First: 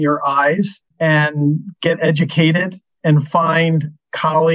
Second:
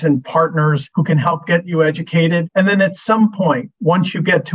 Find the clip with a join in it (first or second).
second